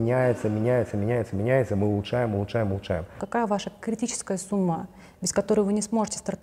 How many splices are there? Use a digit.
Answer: 1